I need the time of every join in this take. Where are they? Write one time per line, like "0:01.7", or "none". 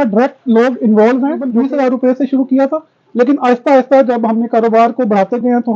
0:01.5